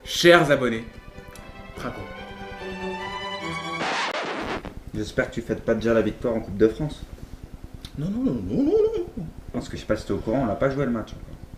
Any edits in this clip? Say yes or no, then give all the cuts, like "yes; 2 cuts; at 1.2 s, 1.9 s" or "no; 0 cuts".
yes; 1 cut; at 4.7 s